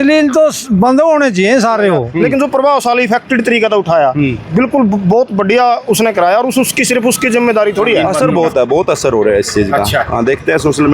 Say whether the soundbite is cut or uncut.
cut